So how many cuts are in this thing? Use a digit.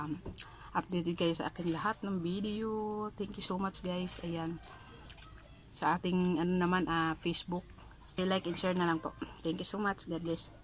1